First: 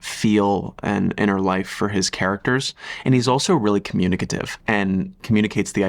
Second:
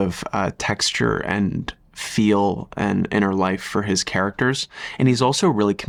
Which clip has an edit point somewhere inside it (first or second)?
first